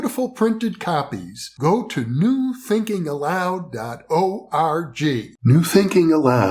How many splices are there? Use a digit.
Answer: 1